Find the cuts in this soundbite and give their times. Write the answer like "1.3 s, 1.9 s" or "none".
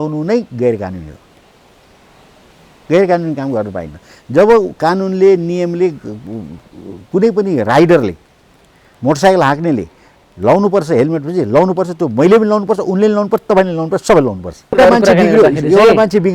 14.8 s